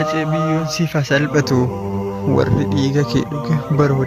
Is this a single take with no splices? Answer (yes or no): yes